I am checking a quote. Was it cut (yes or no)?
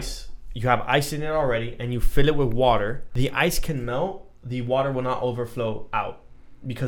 yes